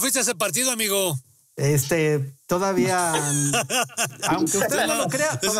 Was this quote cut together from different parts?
no; 0 cuts

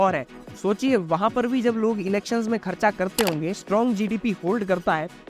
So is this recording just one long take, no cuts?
no; 1 cut; at 3.6 s

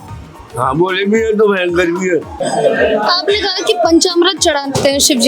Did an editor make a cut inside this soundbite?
yes; 1 cut; at 2.4 s

